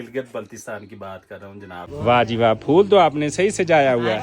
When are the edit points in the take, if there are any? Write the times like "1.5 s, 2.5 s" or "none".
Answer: 1.8 s

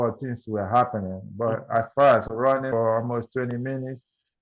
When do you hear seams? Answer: 2.7 s

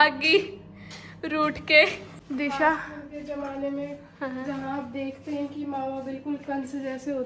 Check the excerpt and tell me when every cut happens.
none

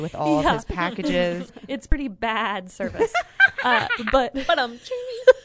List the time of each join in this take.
1.5 s

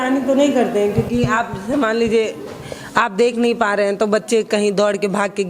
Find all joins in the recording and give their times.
none

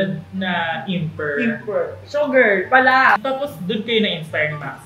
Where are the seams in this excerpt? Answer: 3.2 s

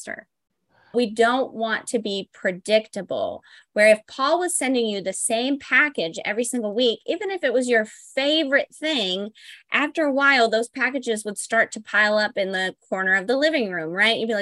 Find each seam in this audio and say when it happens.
0.9 s

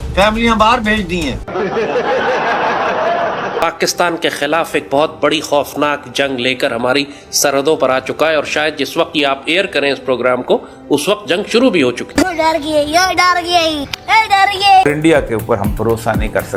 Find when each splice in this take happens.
none

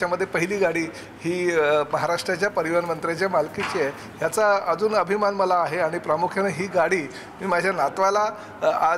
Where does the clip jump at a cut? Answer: none

